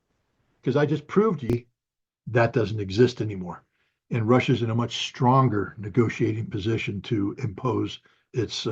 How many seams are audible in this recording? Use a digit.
1